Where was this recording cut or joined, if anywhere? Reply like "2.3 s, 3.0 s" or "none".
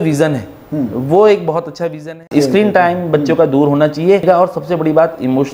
2.3 s, 4.2 s